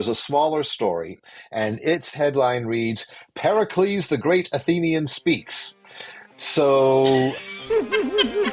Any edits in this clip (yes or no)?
yes